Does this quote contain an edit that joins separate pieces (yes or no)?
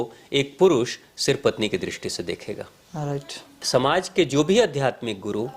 yes